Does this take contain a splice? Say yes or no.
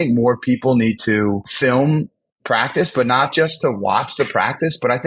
yes